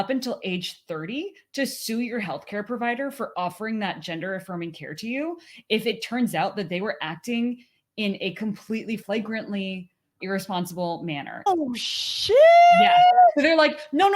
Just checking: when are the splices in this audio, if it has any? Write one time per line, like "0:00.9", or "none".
0:11.5

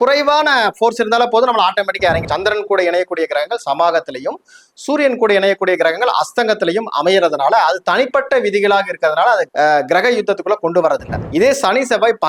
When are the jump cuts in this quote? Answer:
0:02.2
0:11.1

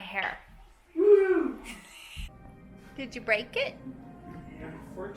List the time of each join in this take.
0:02.8

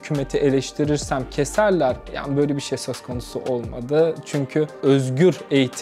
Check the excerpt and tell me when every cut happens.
0:04.7

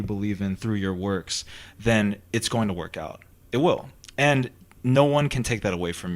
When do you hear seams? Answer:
none

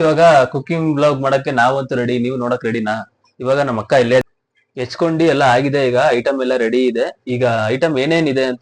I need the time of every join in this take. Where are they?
0:04.2

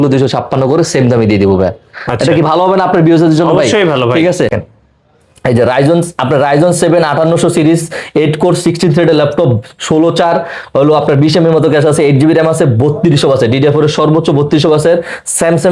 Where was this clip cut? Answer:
0:04.6

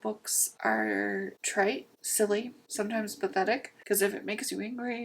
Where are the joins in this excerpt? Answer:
0:03.7

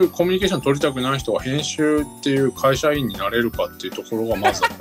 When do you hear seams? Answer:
none

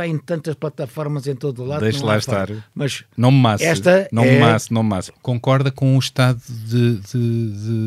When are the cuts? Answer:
0:05.0

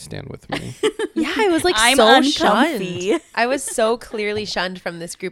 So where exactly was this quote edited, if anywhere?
none

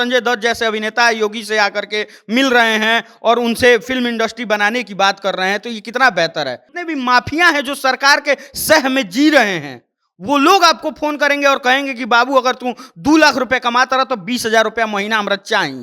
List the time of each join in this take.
0:06.7

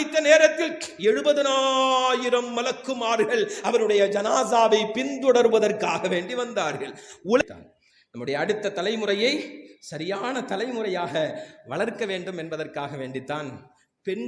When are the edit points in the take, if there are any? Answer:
0:07.4

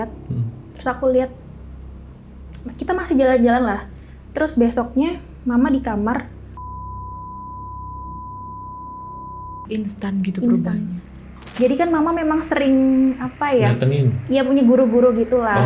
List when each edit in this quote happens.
0:11.4

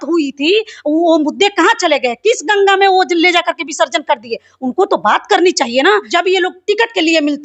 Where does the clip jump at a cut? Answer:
0:06.1

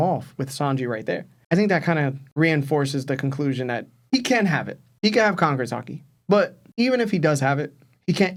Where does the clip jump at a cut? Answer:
none

